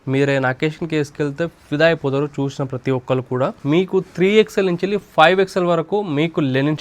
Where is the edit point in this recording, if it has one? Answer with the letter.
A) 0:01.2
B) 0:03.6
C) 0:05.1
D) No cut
B